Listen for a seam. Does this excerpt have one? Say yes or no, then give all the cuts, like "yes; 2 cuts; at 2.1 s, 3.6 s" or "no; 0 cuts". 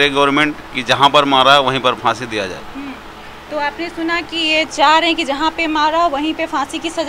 no; 0 cuts